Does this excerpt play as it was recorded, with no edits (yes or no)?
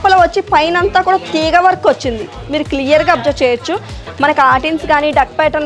no